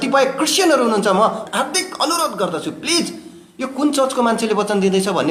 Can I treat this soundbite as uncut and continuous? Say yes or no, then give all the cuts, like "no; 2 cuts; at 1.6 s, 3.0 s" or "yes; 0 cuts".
yes; 0 cuts